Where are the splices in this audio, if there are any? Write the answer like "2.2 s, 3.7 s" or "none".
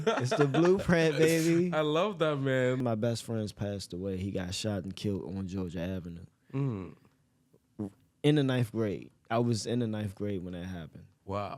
2.8 s